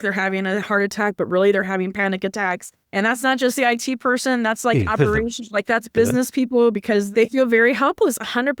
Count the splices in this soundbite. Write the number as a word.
two